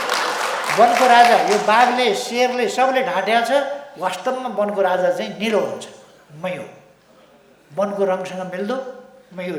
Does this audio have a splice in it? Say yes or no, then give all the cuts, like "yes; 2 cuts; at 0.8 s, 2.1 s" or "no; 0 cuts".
no; 0 cuts